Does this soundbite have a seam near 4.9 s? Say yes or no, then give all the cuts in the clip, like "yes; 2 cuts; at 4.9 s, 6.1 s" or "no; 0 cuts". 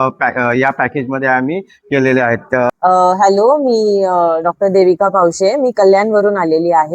no; 1 cut; at 2.7 s